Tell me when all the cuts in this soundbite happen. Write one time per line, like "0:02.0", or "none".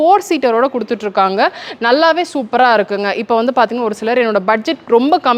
none